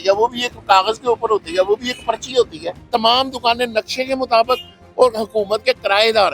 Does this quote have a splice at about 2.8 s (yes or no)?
yes